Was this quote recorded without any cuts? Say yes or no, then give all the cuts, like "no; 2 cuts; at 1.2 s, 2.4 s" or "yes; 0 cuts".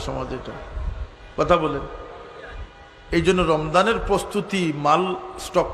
yes; 0 cuts